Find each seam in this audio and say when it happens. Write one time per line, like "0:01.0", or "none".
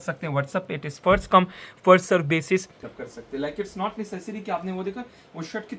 0:02.8